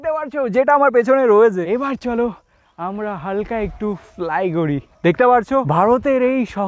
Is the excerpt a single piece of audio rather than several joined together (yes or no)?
no